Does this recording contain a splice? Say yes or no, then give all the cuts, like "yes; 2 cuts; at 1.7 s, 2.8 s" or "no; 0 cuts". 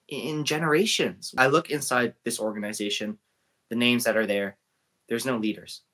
yes; 1 cut; at 1.2 s